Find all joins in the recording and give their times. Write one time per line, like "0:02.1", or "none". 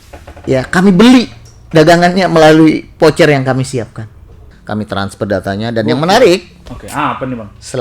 0:04.6